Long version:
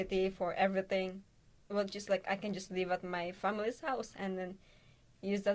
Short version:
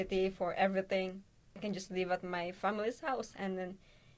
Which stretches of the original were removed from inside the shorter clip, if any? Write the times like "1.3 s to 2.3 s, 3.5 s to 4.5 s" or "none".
1.6 s to 2.4 s

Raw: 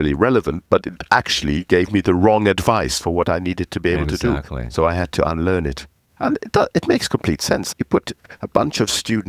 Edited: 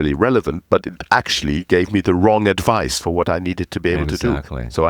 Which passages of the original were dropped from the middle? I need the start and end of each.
none

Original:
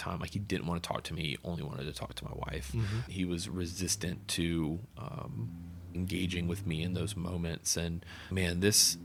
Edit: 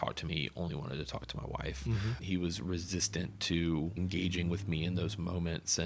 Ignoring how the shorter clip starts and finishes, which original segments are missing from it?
4.8 s to 5.9 s

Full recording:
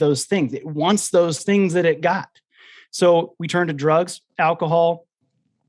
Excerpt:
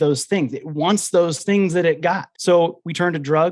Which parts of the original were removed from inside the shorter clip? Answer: 2.3 s to 2.8 s

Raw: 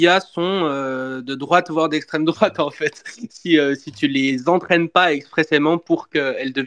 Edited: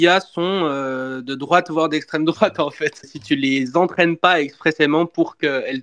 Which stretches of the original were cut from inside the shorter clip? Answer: 3.1 s to 3.9 s

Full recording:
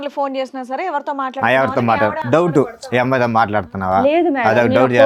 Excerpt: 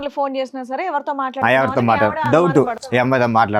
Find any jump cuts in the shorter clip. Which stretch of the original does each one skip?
none

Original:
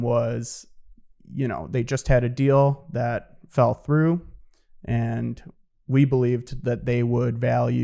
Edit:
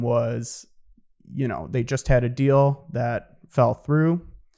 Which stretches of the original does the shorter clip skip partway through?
none

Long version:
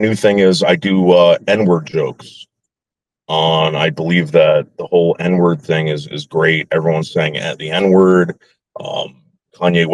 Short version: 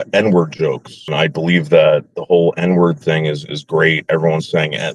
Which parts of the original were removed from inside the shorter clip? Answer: 2.5 s to 3.7 s

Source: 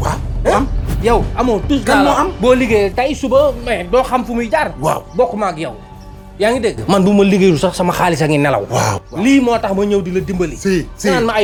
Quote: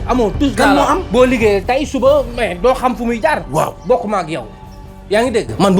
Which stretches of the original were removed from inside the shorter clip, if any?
none

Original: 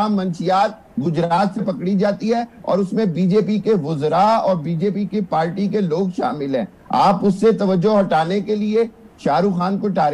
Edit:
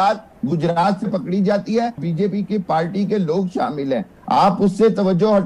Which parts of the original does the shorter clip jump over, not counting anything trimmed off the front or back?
2.6 s to 4.6 s

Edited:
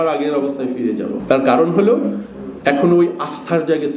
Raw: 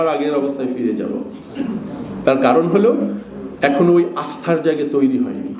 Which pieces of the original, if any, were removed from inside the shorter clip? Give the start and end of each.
1.2 s to 2.1 s

